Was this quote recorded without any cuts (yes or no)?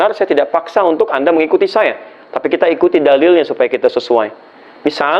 yes